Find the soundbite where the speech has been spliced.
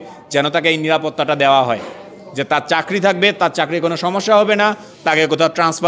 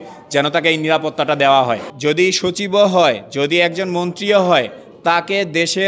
second; 1 cut; at 1.9 s

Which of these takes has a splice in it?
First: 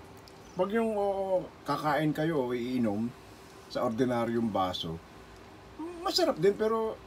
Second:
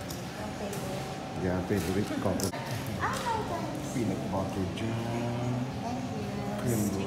second; 1 cut; at 2.5 s

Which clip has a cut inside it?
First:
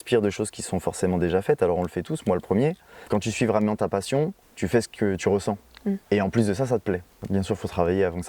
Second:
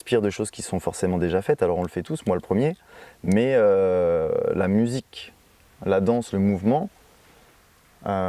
first; 4 cuts; at 2.9 s, 4.4 s, 6.0 s, 7.1 s

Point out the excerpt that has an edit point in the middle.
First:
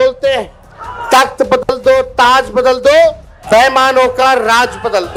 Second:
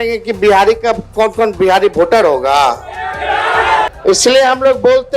second; 1 cut; at 3.9 s

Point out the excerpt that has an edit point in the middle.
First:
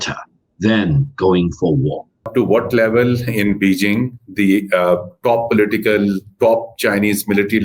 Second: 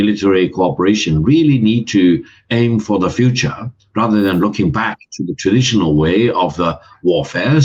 first; 1 cut; at 2.3 s

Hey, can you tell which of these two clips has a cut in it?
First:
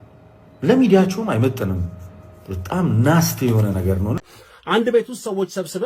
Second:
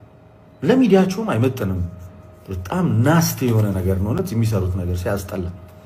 first; 1 cut; at 4.2 s

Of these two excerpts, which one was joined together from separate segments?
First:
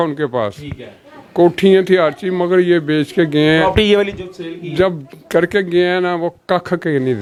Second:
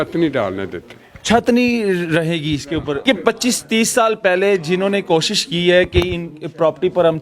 second; 1 cut; at 3.0 s

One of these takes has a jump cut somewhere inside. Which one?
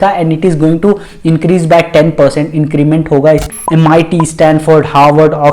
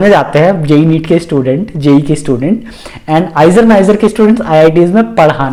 first; 1 cut; at 3.5 s

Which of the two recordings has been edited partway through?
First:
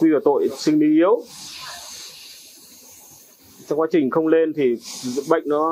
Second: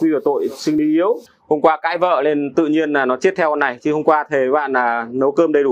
second; 1 cut; at 0.9 s

